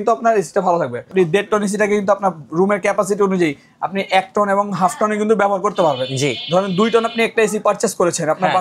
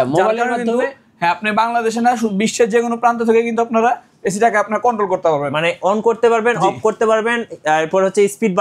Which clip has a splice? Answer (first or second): first